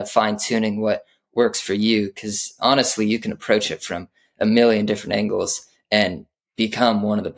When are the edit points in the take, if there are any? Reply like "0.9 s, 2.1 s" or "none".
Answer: none